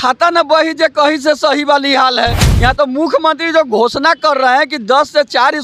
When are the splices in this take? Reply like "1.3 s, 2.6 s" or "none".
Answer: none